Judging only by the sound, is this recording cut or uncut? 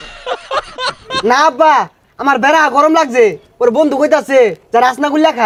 uncut